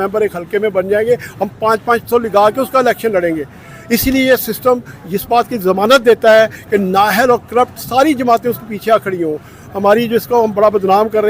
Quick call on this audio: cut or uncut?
uncut